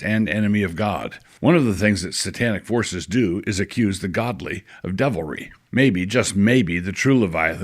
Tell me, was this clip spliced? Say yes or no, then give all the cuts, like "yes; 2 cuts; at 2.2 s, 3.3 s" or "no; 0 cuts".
yes; 1 cut; at 1.3 s